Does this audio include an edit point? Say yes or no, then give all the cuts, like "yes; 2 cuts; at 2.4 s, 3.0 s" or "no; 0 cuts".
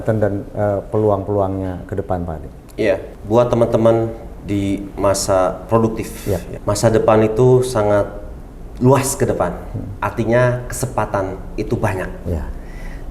yes; 2 cuts; at 3.1 s, 6.5 s